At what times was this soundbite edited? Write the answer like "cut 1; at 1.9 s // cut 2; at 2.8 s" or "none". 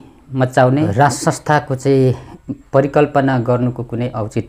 cut 1; at 0.9 s // cut 2; at 2.3 s